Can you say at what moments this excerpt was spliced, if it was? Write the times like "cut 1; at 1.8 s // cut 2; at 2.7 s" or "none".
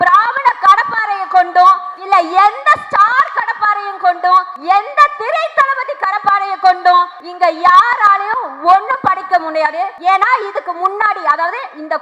cut 1; at 1.9 s // cut 2; at 4.5 s // cut 3; at 7.2 s // cut 4; at 9.9 s